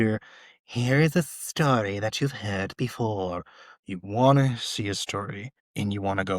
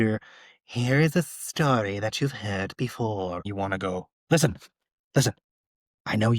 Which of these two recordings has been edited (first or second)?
second